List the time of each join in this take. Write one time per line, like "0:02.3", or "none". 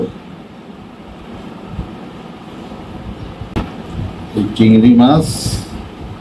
0:03.5